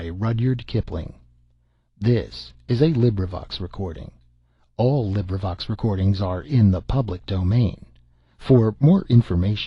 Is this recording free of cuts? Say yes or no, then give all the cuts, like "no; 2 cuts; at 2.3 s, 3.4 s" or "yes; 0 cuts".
yes; 0 cuts